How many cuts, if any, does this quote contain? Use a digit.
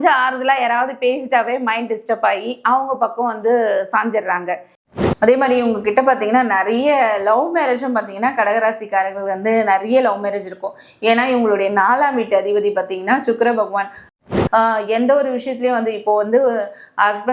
2